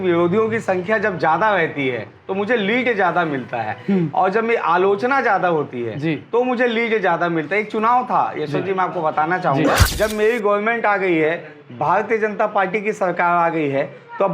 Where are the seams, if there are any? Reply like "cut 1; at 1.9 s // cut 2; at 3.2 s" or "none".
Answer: cut 1; at 9.8 s